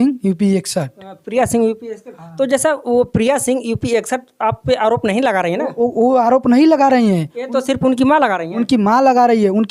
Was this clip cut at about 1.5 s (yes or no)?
no